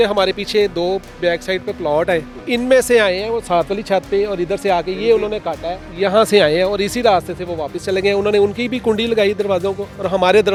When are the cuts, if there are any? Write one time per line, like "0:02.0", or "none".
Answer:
none